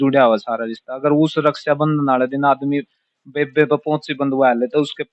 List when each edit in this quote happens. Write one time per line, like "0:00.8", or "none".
none